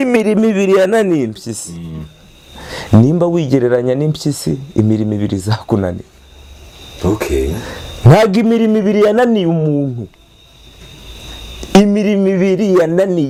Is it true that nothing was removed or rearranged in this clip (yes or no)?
yes